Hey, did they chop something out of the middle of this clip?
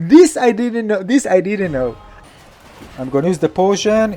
yes; 1 cut; at 2.1 s

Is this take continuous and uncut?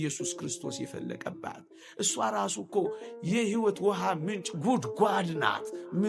yes; 0 cuts

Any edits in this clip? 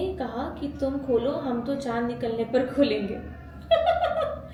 no; 0 cuts

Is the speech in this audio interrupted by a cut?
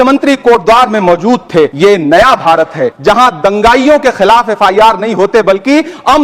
yes; 2 cuts; at 1.7 s, 2.9 s

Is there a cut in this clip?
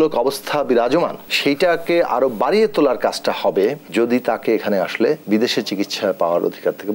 yes; 3 cuts; at 1.3 s, 3.8 s, 5.2 s

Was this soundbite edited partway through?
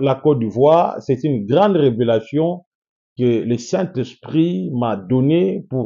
no; 0 cuts

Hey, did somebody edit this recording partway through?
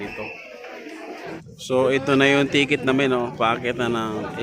yes; 1 cut; at 1.4 s

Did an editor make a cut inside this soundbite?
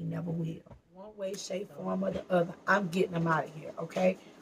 yes; 1 cut; at 1.1 s

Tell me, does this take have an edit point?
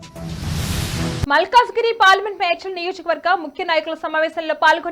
yes; 1 cut; at 1.2 s

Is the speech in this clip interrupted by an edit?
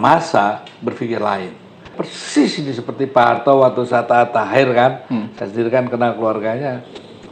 yes; 1 cut; at 2.0 s

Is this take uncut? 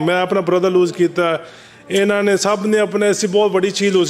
yes; 0 cuts

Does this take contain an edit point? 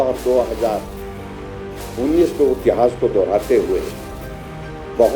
yes; 1 cut; at 2.6 s

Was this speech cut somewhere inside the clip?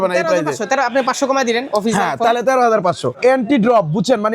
yes; 1 cut; at 3.2 s

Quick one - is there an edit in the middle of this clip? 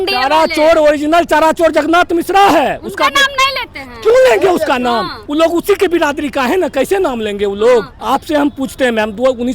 yes; 2 cuts; at 5.2 s, 8.0 s

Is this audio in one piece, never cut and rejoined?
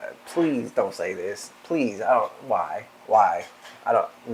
yes; 0 cuts

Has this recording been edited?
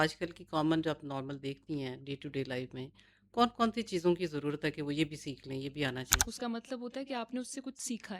yes; 1 cut; at 6.2 s

